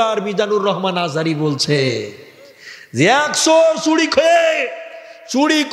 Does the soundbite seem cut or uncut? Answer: uncut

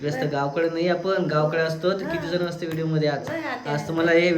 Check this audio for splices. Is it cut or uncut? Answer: uncut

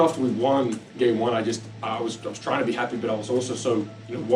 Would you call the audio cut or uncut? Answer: uncut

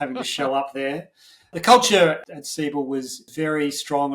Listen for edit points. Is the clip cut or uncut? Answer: cut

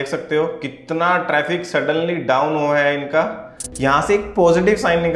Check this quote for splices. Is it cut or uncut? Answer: cut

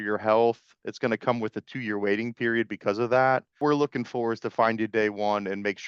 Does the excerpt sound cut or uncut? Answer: cut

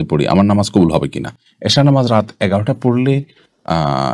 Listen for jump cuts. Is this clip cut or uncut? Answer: uncut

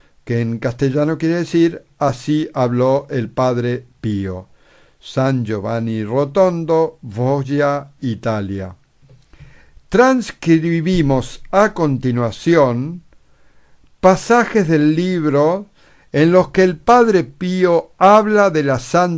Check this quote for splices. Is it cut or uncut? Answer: cut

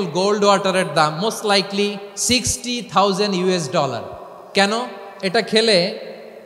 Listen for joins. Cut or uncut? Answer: cut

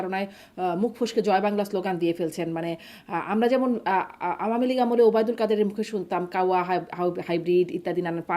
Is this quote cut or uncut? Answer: uncut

